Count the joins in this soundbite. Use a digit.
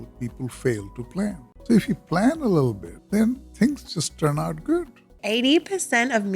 3